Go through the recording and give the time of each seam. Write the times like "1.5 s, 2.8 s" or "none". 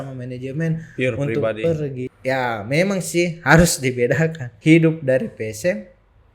2.0 s, 4.5 s

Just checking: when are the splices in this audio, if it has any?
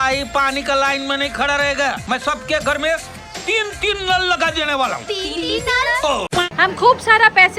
6.5 s

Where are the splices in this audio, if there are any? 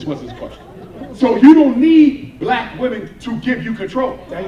1.2 s

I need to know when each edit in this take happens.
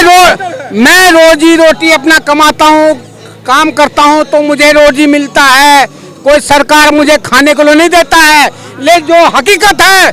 none

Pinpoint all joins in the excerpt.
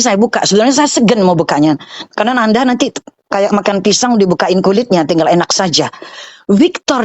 none

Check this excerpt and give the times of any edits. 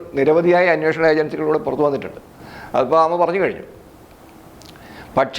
none

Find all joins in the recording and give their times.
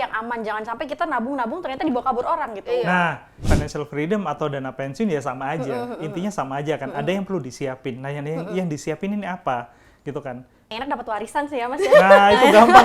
3.5 s, 10.7 s

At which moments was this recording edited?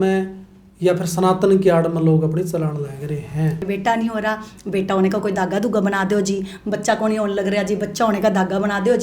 3.6 s

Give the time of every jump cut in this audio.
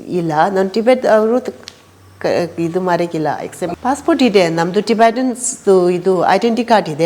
3.7 s

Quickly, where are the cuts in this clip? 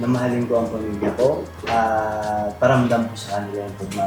1.5 s

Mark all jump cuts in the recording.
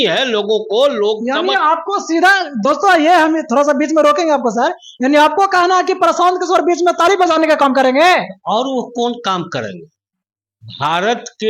none

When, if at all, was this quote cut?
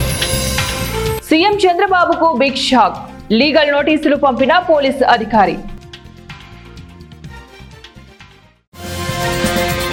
none

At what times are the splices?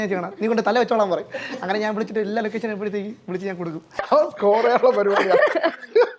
3.9 s

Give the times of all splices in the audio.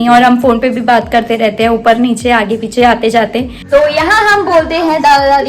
3.5 s

